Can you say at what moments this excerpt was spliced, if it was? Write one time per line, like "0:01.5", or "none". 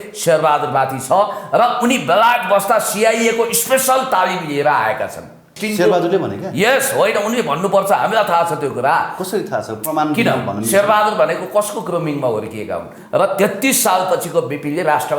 0:05.5
0:13.0